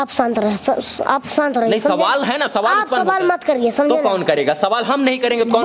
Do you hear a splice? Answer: no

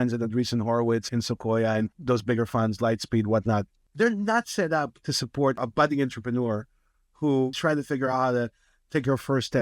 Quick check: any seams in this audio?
yes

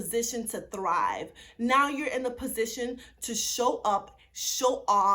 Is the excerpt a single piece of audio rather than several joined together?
yes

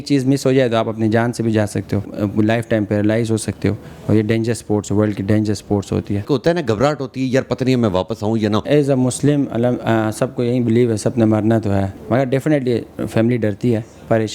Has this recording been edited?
yes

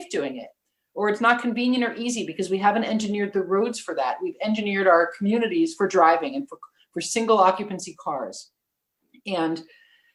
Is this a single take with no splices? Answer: yes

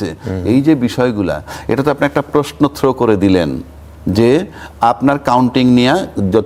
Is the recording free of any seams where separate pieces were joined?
yes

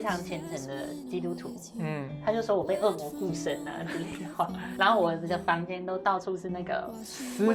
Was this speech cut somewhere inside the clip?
no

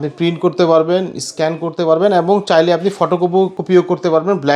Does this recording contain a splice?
yes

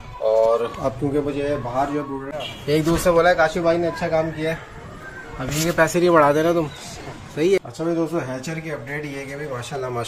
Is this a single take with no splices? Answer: no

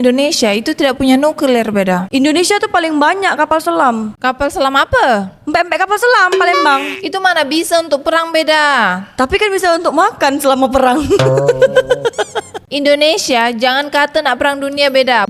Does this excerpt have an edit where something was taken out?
no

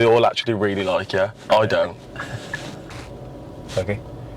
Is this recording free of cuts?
no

